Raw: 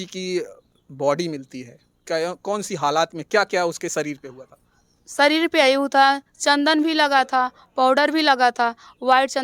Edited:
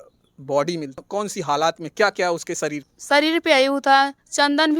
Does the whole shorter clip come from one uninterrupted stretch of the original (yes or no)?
no